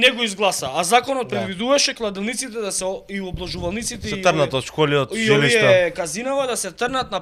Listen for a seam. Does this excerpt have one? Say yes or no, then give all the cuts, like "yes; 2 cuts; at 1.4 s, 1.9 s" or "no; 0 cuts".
no; 0 cuts